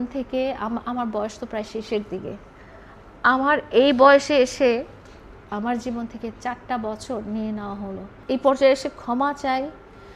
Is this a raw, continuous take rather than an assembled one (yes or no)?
no